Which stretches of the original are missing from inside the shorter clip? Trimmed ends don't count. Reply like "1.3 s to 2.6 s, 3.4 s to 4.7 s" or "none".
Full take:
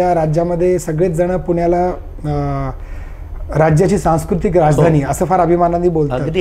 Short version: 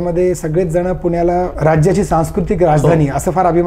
2.0 s to 3.5 s